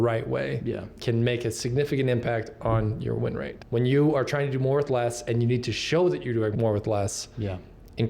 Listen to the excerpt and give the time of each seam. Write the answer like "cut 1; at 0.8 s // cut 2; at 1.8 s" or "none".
cut 1; at 3.5 s // cut 2; at 6.5 s